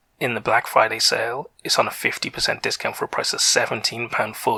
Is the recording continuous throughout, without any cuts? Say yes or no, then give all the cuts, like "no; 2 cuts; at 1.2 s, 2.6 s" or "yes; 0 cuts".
yes; 0 cuts